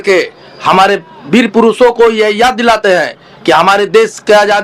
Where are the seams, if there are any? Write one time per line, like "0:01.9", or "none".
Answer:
none